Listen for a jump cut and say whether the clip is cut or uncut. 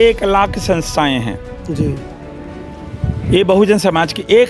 uncut